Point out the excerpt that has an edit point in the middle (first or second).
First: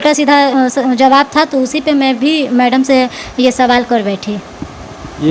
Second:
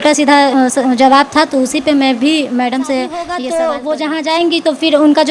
second